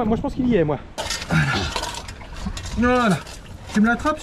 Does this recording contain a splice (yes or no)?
yes